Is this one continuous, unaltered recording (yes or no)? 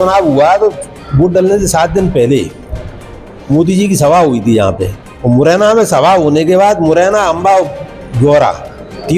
yes